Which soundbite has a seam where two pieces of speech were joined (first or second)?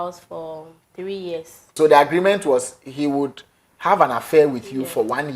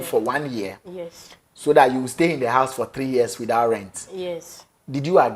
first